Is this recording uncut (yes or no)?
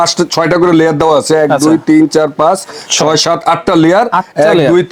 yes